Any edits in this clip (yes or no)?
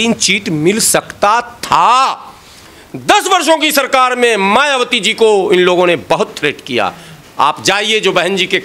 no